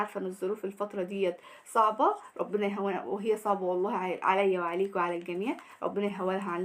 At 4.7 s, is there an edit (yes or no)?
no